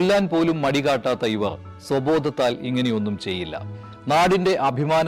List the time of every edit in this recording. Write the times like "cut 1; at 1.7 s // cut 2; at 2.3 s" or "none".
none